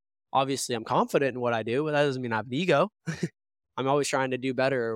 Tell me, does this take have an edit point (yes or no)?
no